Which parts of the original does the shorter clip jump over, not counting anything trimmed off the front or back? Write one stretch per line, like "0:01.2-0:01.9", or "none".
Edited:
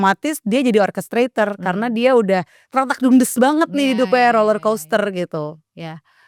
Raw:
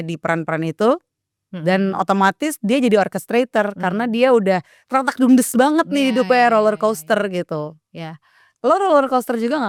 none